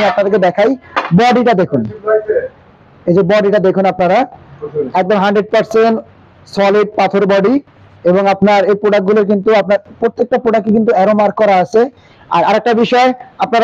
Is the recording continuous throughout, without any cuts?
yes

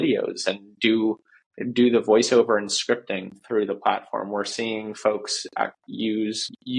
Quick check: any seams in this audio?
no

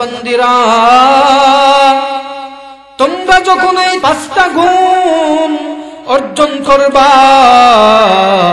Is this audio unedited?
no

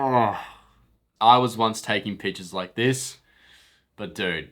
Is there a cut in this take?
yes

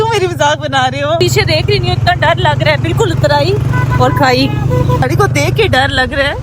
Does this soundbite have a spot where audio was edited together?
yes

